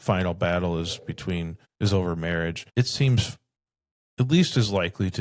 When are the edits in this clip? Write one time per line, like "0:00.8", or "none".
0:01.6
0:02.6